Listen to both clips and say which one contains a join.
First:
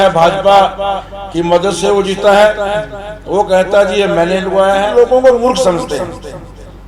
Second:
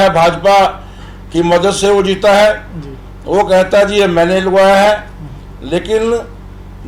first; 1 cut; at 4.9 s

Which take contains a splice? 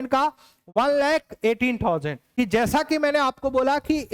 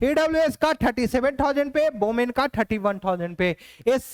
first; 1 cut; at 2.2 s

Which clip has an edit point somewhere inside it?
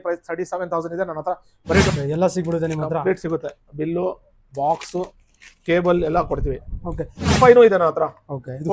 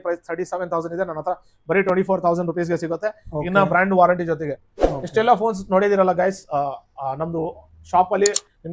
first; 2 cuts; at 1.9 s, 7.4 s

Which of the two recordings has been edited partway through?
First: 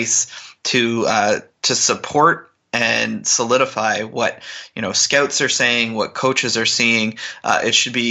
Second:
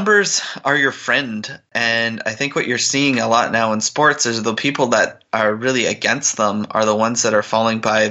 second; 1 cut; at 1.7 s

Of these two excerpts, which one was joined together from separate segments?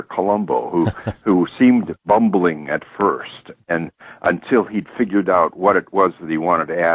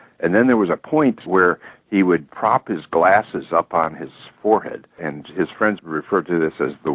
second; 3 cuts; at 1.2 s, 2.3 s, 5.8 s

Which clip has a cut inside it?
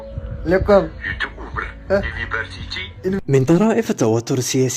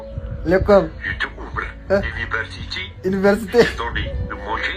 first; 1 cut; at 3.2 s

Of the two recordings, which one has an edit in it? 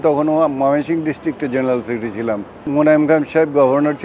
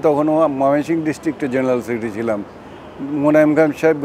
first; 1 cut; at 2.6 s

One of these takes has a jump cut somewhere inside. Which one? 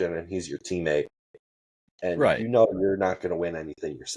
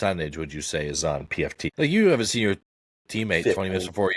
second; 1 cut; at 1.6 s

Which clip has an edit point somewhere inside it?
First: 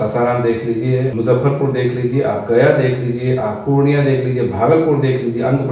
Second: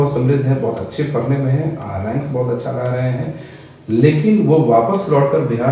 first; 1 cut; at 1.1 s

